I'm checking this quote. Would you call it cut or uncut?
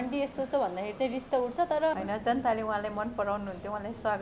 cut